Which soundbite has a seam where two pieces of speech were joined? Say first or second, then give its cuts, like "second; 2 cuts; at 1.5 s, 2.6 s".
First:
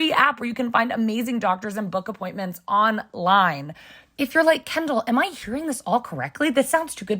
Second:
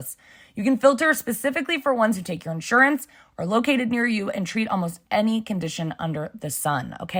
first; 1 cut; at 4.1 s